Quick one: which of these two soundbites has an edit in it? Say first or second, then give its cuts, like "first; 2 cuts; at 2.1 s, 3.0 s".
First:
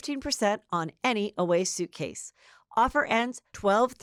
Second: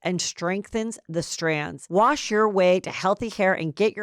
second; 1 cut; at 1.7 s